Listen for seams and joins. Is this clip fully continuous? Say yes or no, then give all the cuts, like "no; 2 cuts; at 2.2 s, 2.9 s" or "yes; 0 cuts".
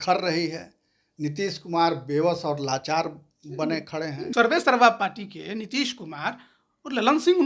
no; 1 cut; at 4.2 s